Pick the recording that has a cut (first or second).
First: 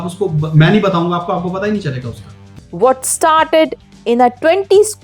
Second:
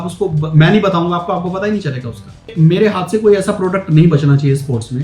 second